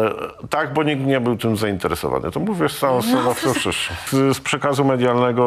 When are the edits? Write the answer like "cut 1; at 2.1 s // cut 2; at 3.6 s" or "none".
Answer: cut 1; at 4.0 s